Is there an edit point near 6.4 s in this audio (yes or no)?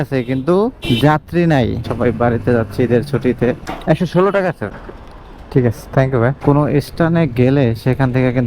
yes